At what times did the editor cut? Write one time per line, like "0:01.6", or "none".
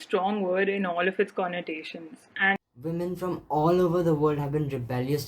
0:02.6